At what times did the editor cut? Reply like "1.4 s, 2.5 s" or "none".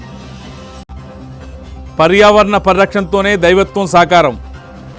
1.3 s

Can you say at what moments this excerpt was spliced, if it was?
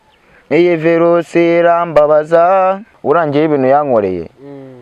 2.9 s

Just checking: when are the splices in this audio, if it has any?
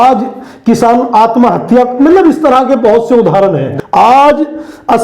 3.7 s

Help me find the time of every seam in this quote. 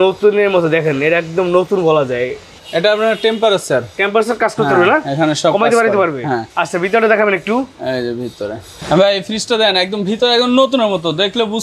none

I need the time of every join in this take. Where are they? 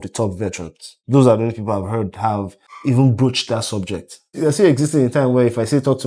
1.0 s, 2.6 s, 4.3 s

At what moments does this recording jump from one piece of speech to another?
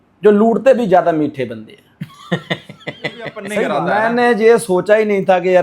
3.5 s

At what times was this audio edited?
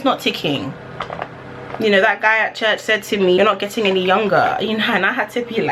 3.4 s

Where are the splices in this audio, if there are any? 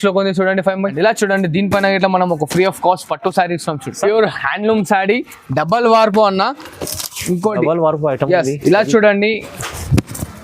0.9 s, 4.0 s

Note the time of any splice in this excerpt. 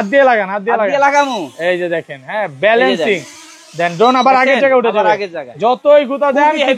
none

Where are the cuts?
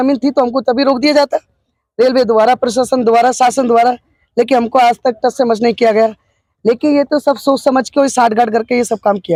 none

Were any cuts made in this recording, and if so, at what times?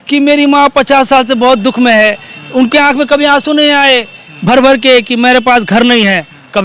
none

